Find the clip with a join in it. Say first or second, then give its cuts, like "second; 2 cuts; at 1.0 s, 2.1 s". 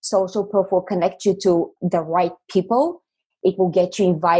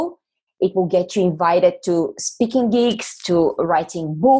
first; 1 cut; at 1.8 s